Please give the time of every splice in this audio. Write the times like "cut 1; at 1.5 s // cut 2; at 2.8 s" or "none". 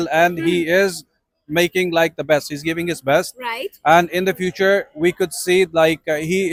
none